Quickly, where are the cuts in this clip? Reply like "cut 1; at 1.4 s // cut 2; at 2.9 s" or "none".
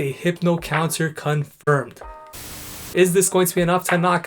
cut 1; at 2.4 s